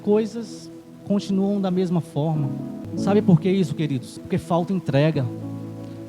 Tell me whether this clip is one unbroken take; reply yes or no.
no